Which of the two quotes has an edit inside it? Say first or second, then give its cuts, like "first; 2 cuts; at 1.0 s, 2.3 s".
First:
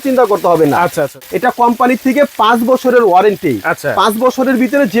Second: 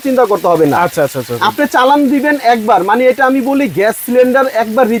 first; 1 cut; at 1.2 s